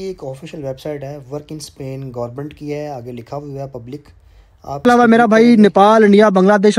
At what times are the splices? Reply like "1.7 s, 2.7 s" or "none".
4.9 s